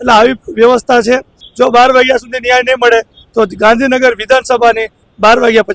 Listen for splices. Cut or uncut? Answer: cut